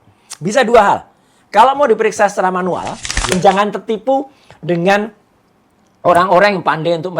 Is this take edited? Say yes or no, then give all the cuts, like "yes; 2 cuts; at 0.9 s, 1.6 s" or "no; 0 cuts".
yes; 1 cut; at 3.3 s